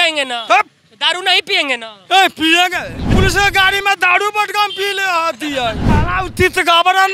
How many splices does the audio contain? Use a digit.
2